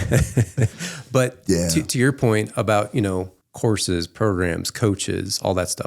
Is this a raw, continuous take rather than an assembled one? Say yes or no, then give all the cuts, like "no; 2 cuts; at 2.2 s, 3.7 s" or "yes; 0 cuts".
no; 1 cut; at 3.4 s